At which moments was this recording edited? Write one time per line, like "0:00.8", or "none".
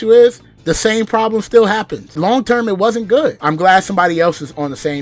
0:02.1
0:03.4